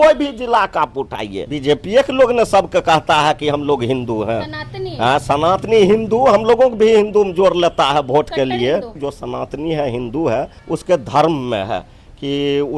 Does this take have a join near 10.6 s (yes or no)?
yes